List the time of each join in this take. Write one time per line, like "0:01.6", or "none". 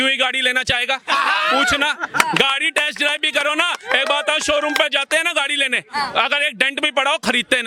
none